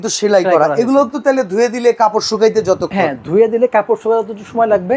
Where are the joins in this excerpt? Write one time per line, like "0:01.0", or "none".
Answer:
none